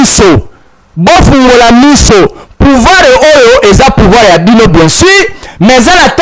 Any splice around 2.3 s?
no; 0 cuts

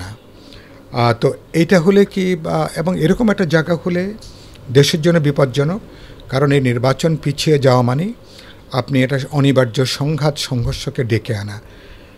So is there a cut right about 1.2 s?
no; 0 cuts

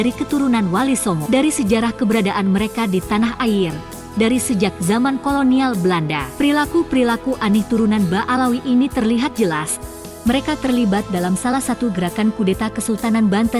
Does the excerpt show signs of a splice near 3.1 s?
no; 3 cuts; at 1.2 s, 6.2 s, 10.0 s

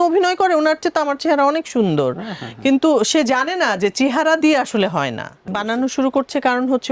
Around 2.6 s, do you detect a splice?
no; 1 cut; at 5.4 s

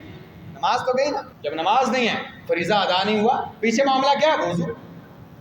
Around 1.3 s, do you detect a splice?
yes; 1 cut; at 1.3 s

